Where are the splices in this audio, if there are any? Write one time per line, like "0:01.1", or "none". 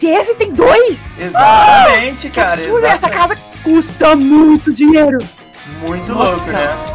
none